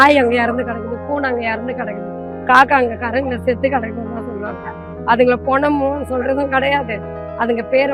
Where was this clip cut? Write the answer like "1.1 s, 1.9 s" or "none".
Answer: none